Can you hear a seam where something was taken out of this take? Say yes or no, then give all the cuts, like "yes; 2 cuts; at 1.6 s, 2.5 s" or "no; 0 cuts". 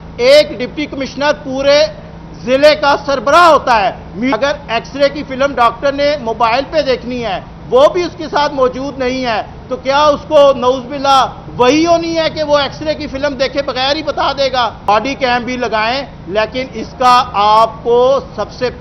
yes; 2 cuts; at 4.4 s, 14.8 s